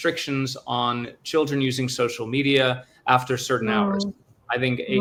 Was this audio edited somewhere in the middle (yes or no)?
no